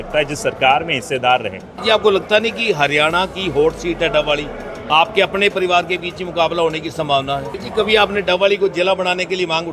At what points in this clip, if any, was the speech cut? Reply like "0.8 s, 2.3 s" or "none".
1.7 s, 7.6 s